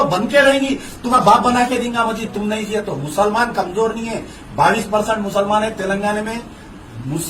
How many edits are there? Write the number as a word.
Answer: one